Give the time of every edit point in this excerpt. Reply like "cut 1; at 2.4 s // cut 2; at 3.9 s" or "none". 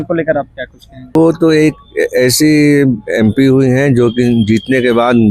cut 1; at 1.2 s